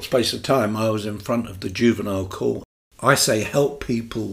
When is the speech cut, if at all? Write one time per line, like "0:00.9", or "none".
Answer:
0:02.7